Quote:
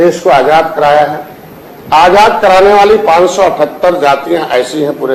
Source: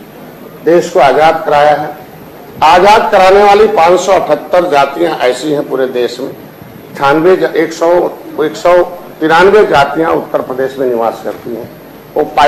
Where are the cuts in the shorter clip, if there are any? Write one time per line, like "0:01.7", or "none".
none